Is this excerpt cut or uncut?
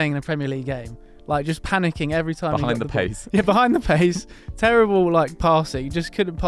uncut